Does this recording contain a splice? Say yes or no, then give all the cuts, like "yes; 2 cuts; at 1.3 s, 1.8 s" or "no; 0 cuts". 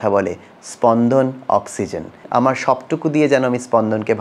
yes; 1 cut; at 2.2 s